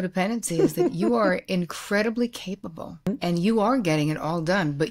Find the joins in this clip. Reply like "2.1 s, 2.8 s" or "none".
3.1 s